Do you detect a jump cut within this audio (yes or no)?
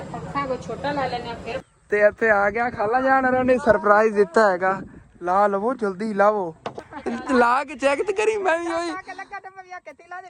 yes